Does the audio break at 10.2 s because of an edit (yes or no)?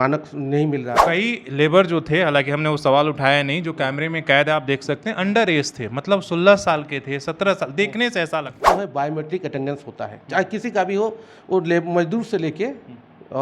no